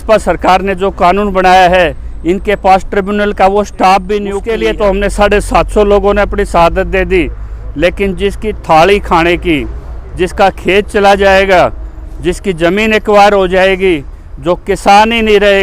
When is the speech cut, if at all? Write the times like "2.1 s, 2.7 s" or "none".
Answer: 4.4 s